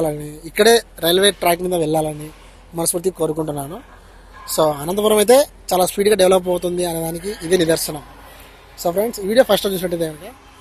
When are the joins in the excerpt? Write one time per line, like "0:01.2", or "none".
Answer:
none

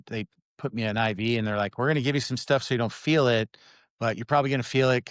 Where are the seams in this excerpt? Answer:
none

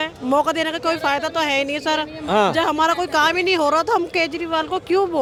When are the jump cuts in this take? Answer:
none

